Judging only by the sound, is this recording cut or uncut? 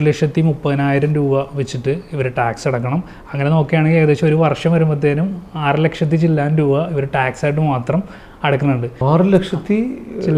cut